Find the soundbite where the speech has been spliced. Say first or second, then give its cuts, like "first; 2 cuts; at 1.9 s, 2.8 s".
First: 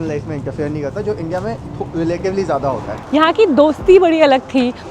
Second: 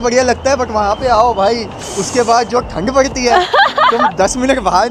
first; 1 cut; at 2.9 s